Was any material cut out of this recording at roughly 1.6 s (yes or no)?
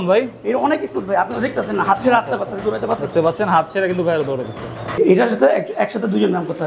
no